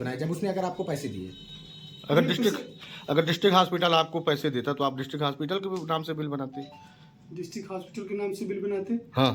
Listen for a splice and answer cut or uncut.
uncut